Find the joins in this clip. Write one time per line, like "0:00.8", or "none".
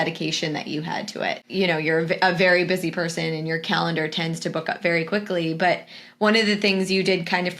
0:01.4